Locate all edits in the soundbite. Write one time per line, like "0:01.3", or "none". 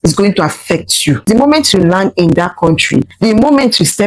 0:01.2